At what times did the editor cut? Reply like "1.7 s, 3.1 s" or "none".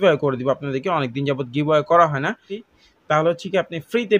2.6 s